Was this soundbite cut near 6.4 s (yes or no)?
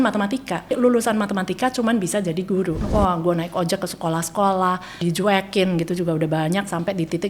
no